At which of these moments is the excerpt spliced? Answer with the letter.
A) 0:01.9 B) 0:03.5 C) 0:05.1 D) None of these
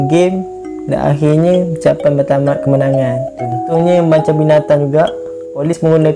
B